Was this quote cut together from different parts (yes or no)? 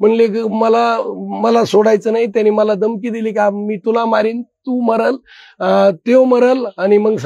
no